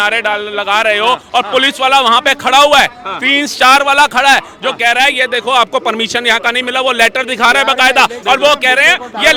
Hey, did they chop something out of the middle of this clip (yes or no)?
no